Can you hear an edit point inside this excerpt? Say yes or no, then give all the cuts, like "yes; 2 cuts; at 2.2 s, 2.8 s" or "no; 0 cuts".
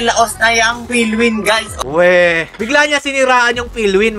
yes; 2 cuts; at 1.7 s, 2.5 s